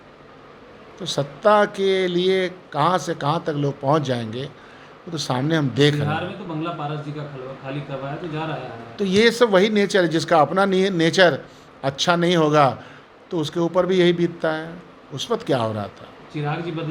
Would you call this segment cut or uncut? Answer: uncut